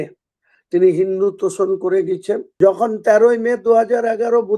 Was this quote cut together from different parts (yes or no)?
yes